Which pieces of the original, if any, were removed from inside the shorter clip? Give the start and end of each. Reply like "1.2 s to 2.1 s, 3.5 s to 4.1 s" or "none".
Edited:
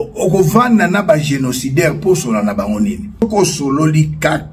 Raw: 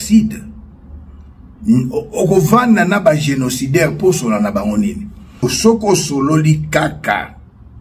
5.2 s to 5.7 s